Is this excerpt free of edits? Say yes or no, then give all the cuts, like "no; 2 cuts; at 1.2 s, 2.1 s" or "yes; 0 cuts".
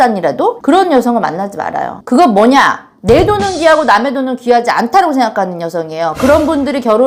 yes; 0 cuts